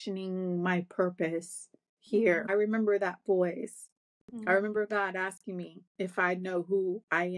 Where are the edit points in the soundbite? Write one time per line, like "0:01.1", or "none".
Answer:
0:02.5